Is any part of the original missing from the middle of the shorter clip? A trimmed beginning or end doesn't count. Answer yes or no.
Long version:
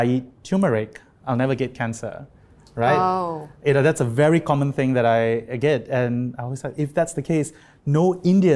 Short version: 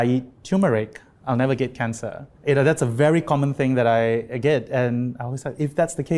yes